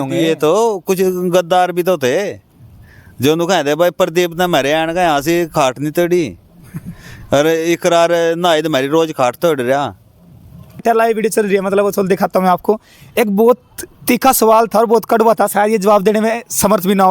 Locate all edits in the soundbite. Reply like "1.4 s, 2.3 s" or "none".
10.8 s